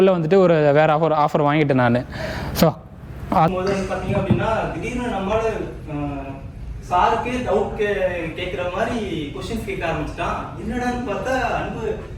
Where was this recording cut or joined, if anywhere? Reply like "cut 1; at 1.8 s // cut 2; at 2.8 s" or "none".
cut 1; at 3.5 s